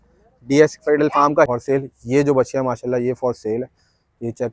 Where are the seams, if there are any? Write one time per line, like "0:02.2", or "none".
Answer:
0:01.5